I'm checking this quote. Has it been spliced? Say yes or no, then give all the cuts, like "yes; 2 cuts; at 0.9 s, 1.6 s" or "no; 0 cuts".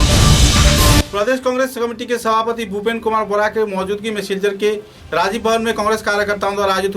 yes; 1 cut; at 1.0 s